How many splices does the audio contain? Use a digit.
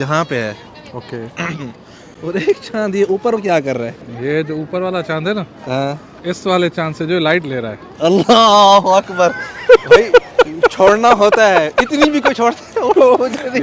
0